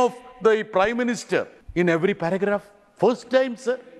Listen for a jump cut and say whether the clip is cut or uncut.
cut